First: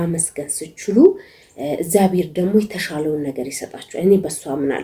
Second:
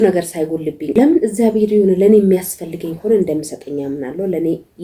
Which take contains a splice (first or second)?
second